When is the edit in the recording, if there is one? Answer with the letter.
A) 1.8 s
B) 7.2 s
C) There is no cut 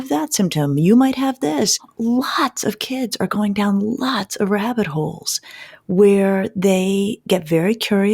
A